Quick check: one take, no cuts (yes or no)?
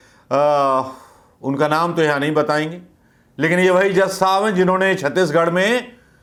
yes